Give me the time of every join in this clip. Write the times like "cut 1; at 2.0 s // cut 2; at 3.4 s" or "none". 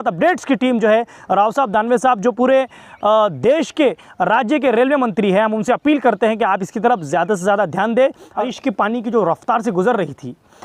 cut 1; at 8.4 s